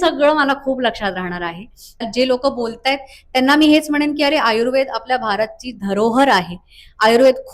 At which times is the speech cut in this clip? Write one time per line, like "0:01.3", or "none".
0:02.1